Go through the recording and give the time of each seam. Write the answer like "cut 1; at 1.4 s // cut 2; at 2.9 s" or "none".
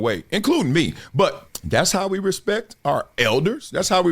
cut 1; at 1.5 s